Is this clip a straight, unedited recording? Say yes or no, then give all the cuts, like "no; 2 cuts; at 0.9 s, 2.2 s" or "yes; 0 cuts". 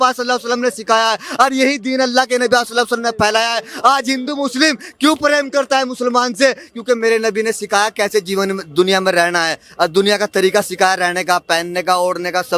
yes; 0 cuts